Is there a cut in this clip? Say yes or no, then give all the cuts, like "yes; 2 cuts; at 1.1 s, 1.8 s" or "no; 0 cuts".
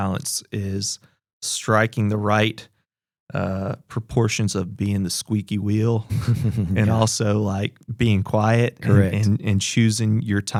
no; 0 cuts